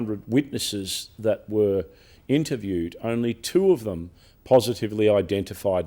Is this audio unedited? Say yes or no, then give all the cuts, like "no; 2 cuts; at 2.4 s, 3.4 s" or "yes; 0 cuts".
yes; 0 cuts